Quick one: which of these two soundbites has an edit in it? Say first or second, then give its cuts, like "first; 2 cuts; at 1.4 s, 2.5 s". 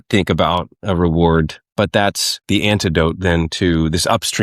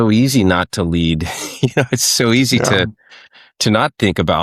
first; 1 cut; at 1.9 s